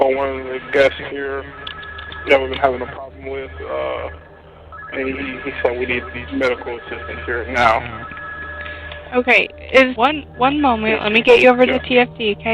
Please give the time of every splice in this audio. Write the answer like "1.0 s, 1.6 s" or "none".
9.9 s